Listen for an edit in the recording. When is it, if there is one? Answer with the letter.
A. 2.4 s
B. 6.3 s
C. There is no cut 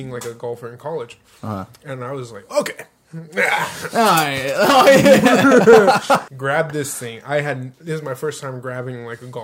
B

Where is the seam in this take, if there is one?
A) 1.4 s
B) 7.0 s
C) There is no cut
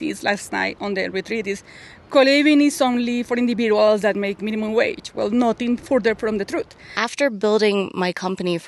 B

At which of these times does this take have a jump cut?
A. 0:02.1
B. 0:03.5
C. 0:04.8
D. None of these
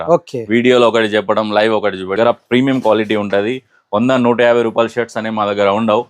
A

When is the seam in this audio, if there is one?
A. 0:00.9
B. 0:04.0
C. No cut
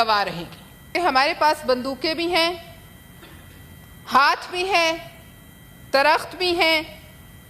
A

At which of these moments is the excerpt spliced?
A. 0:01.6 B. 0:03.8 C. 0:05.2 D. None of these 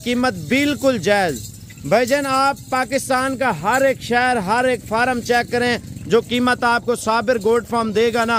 D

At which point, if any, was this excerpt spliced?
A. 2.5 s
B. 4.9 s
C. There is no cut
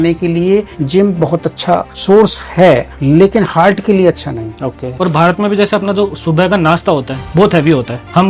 B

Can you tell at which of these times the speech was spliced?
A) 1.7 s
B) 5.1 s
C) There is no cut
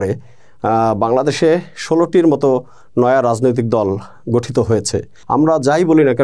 B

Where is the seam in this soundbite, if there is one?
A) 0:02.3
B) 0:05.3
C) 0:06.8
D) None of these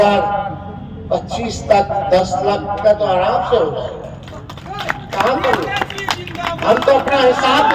D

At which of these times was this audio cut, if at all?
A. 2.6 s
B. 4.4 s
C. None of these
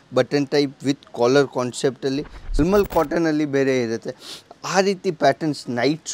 A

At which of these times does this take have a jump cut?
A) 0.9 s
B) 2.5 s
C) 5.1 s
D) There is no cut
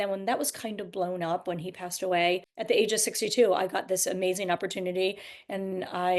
B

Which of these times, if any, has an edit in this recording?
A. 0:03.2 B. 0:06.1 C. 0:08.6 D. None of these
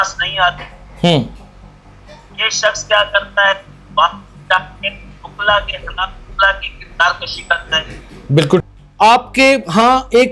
C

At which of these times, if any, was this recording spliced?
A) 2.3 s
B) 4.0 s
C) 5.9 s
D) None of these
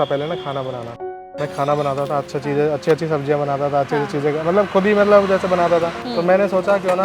C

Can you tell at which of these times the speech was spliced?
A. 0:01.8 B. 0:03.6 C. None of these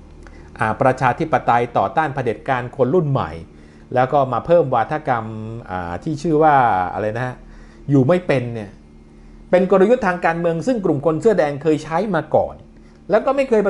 C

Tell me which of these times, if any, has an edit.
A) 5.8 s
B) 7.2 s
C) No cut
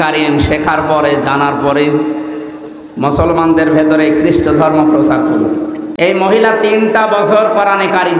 A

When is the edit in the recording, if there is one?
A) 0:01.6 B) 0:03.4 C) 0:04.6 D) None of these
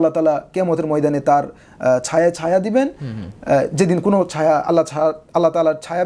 D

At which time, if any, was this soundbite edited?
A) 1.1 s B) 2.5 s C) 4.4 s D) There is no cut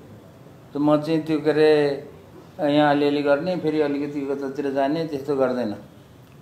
D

